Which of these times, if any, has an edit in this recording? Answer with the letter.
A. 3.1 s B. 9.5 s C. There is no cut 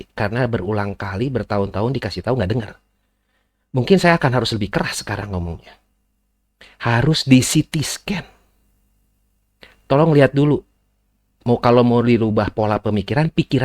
C